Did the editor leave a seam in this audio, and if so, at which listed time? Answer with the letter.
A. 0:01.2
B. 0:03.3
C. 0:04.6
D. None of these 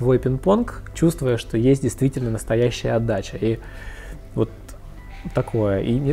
D